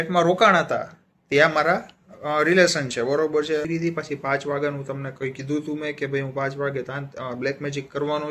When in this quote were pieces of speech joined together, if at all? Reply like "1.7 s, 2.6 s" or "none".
3.7 s

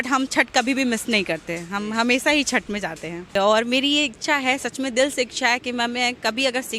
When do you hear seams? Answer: 3.3 s

